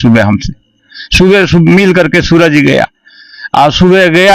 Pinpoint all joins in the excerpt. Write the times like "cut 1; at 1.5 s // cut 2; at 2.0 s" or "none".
none